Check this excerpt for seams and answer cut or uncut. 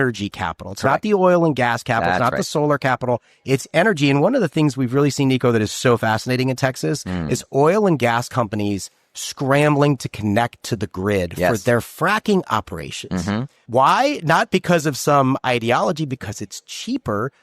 cut